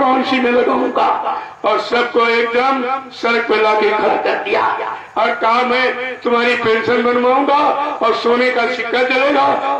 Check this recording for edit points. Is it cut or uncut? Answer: uncut